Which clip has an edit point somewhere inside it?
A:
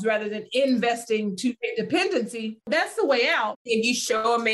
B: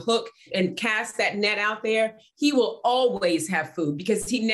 A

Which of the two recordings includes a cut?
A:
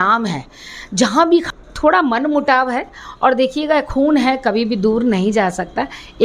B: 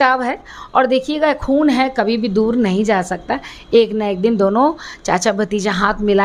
A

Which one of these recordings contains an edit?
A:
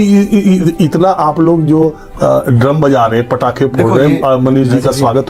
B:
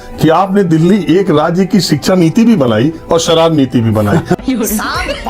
B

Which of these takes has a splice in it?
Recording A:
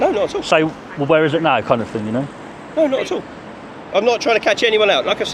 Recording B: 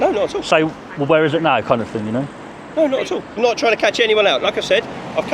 B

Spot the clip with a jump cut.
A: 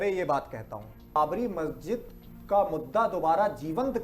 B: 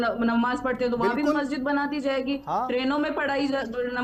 A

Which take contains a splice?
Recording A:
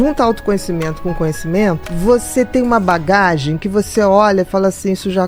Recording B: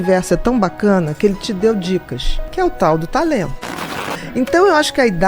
B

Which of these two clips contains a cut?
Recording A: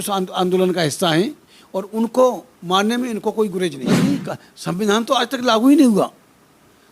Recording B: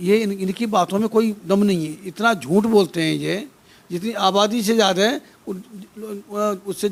A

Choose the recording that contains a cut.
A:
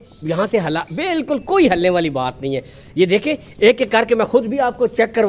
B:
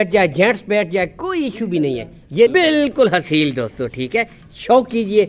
B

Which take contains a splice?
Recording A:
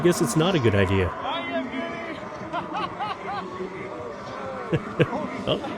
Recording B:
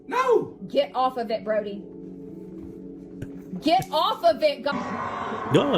B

